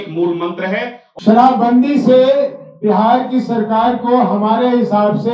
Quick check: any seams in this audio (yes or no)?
yes